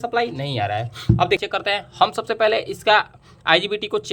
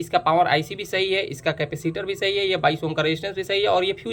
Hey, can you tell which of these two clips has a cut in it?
first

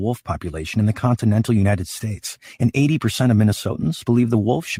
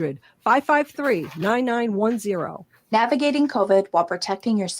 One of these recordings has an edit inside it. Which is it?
second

